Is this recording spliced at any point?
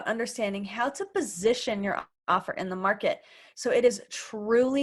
no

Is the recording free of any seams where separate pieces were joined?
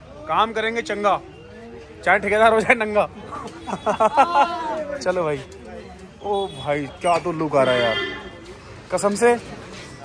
yes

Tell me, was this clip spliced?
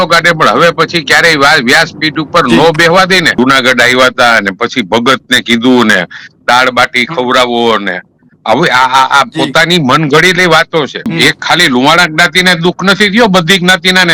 yes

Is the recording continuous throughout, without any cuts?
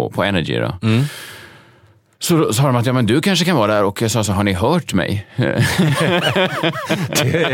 yes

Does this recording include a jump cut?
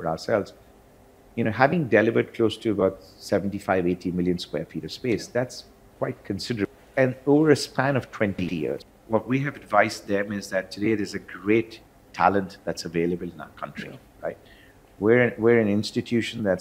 yes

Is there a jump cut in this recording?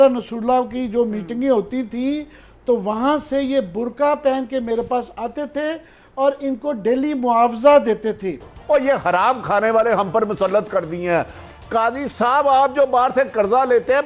yes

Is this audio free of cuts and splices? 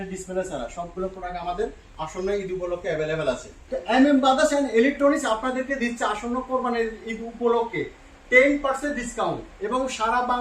no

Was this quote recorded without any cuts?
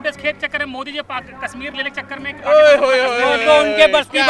yes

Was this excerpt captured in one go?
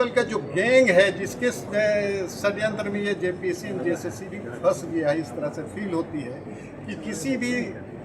yes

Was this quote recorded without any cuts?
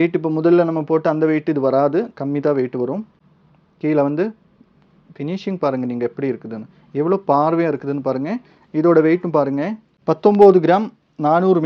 yes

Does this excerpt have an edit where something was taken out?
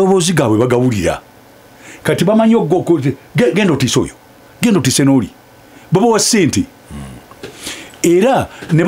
no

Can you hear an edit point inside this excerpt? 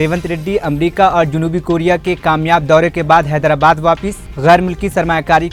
no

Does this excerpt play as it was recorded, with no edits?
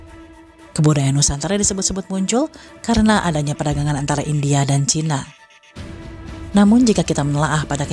yes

